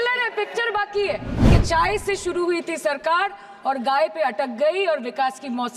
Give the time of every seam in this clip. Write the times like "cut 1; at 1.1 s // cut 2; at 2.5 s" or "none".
cut 1; at 1.5 s